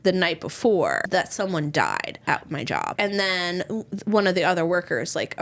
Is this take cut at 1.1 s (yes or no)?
yes